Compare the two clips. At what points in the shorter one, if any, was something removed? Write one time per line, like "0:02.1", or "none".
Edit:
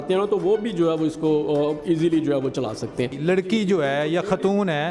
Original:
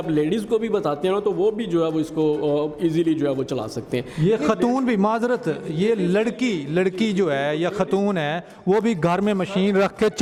0:03.2